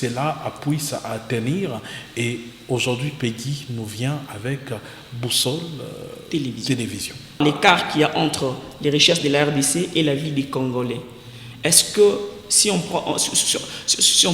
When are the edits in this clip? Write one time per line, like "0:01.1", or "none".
0:07.4